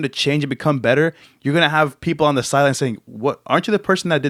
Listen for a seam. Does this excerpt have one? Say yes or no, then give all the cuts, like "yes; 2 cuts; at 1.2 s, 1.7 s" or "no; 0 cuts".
no; 0 cuts